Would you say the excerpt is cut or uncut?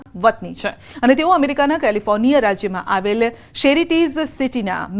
uncut